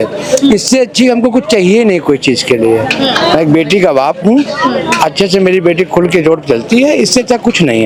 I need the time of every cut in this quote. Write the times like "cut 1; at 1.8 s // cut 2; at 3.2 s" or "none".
none